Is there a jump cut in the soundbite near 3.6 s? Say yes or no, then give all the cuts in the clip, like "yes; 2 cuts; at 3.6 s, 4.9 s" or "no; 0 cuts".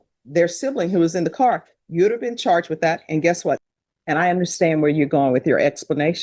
yes; 1 cut; at 3.6 s